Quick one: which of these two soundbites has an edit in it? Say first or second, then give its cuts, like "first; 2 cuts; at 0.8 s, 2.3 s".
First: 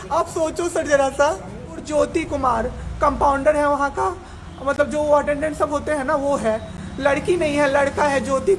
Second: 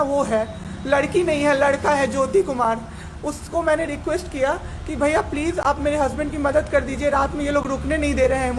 first; 1 cut; at 1.7 s